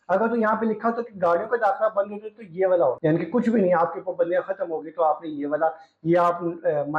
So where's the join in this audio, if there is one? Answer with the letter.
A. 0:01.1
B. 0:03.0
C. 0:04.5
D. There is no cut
B